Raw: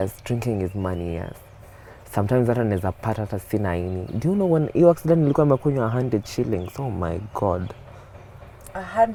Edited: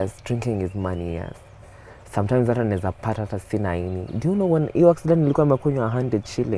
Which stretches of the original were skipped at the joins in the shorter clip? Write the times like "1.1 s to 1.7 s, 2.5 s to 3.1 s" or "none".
none